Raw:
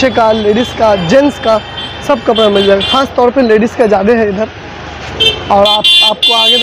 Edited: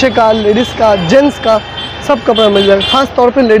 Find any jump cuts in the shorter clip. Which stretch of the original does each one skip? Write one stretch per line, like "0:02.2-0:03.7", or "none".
none